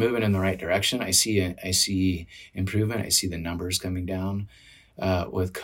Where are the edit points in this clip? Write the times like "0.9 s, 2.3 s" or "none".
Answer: none